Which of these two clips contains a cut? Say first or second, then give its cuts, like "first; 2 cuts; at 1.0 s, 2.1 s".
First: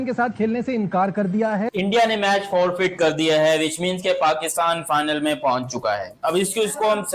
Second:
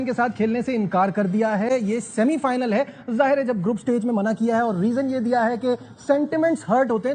first; 1 cut; at 1.7 s